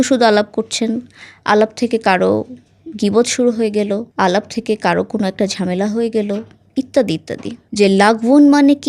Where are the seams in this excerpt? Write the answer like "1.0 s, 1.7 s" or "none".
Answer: 7.6 s